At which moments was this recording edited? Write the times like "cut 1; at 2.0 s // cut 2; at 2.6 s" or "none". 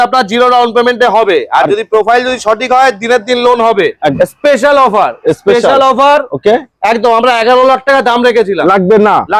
cut 1; at 4.1 s